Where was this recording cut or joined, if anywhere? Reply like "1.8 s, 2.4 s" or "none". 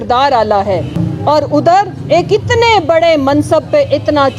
1.0 s